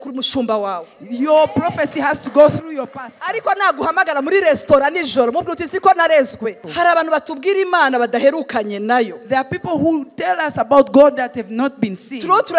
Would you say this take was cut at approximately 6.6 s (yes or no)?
yes